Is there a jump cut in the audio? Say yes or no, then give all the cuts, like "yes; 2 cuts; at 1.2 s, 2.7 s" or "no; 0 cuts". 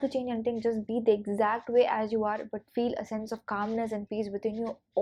no; 0 cuts